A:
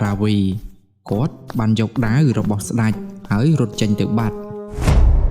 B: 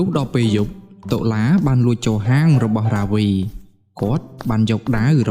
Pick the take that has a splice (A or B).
A